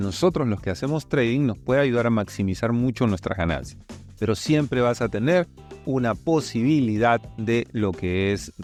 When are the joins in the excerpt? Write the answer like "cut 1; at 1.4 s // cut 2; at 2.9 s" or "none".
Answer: none